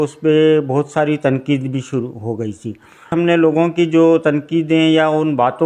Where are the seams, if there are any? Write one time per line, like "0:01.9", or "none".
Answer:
0:03.1